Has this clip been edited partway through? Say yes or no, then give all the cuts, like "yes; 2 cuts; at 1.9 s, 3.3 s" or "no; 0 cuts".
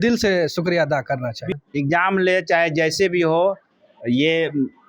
yes; 1 cut; at 1.4 s